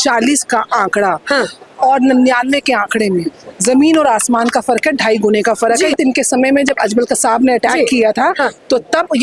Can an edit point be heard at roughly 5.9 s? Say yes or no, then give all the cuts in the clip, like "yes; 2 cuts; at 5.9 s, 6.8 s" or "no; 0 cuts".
yes; 1 cut; at 5.9 s